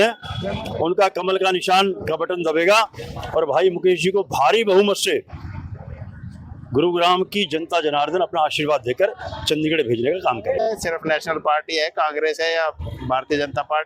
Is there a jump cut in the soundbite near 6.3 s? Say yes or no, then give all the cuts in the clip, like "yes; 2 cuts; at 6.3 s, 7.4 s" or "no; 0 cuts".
no; 1 cut; at 10.7 s